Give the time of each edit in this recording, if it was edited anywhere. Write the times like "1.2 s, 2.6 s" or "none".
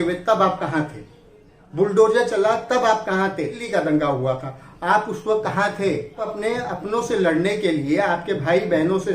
3.6 s, 6.3 s